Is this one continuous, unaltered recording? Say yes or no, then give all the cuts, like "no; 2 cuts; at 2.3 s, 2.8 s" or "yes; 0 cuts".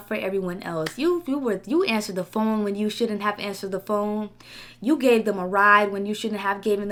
yes; 0 cuts